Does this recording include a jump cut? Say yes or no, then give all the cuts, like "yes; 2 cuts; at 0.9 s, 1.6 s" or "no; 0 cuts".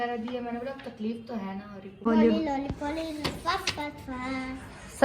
yes; 1 cut; at 2.0 s